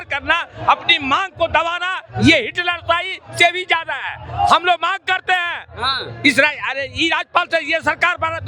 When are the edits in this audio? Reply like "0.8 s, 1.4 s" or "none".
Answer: none

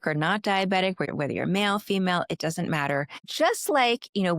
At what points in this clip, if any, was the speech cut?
1.1 s, 3.2 s

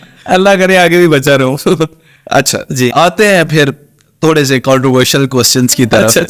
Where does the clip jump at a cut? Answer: none

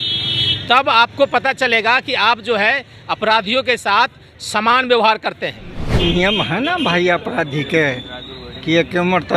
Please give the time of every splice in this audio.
5.8 s

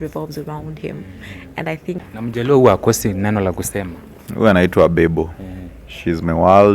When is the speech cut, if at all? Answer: 2.0 s

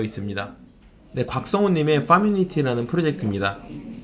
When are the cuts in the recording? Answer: 1.0 s

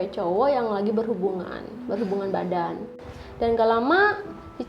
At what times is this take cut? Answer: 2.9 s

